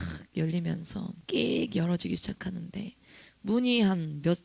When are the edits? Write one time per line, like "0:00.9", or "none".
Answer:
0:01.2